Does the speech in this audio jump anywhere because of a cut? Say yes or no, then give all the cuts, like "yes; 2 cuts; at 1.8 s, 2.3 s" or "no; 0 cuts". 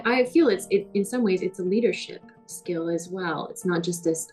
no; 0 cuts